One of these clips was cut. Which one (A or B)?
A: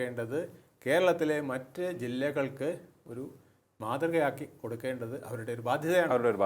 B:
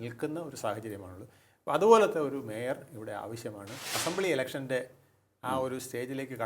B